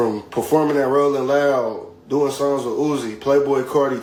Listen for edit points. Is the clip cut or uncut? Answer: uncut